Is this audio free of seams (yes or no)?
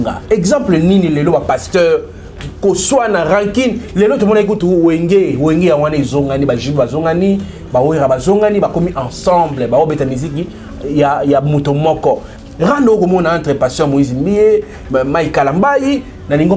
no